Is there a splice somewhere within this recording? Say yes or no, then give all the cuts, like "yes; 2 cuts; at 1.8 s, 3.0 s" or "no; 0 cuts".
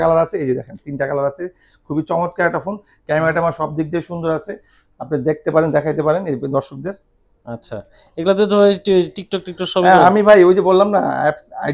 no; 0 cuts